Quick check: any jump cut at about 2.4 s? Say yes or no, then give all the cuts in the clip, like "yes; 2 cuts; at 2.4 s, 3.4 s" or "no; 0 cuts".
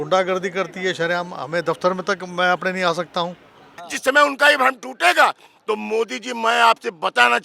no; 1 cut; at 3.8 s